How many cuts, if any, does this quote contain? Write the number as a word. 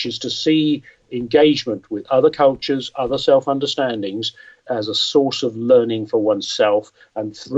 one